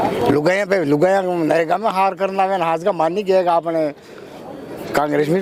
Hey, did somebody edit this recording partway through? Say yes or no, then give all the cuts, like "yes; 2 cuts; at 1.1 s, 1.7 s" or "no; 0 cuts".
no; 0 cuts